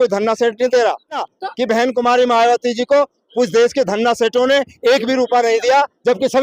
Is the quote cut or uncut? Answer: cut